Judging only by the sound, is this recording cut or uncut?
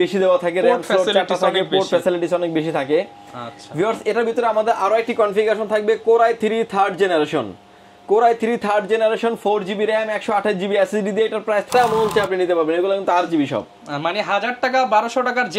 cut